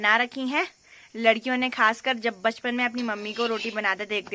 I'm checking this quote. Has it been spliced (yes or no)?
no